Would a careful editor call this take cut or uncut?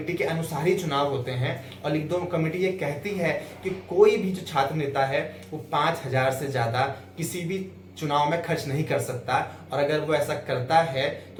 uncut